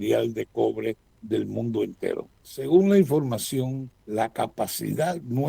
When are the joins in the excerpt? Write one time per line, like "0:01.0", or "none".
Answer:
0:01.1
0:02.4
0:03.9